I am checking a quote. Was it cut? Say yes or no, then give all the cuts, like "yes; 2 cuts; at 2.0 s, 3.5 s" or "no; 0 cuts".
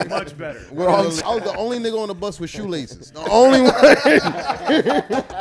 yes; 1 cut; at 1.2 s